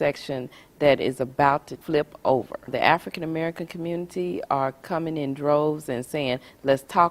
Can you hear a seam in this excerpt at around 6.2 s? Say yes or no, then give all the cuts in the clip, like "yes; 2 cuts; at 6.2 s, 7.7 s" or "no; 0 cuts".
no; 2 cuts; at 1.7 s, 2.7 s